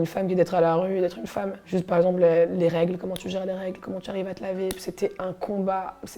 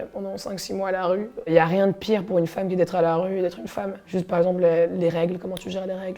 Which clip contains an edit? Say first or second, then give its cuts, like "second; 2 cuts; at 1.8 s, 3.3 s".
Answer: second; 1 cut; at 1.4 s